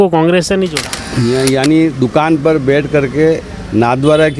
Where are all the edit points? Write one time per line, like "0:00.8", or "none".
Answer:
0:00.9